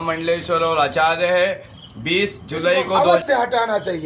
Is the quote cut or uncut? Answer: cut